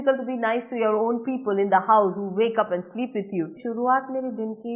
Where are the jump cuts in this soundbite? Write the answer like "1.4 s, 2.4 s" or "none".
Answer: 3.6 s